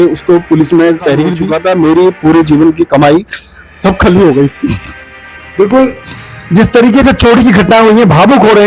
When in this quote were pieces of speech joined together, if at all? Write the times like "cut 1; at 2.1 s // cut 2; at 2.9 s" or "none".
cut 1; at 1.5 s